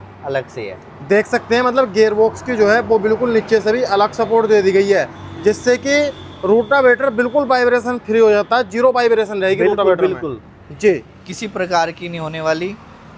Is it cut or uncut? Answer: uncut